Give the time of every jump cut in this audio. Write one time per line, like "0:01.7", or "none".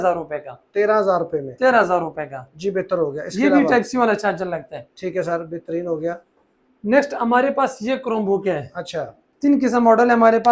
none